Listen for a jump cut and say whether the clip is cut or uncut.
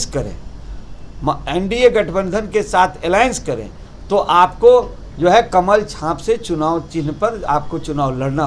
uncut